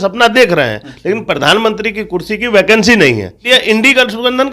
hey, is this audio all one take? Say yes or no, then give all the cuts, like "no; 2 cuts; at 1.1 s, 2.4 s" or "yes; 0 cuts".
no; 1 cut; at 3.4 s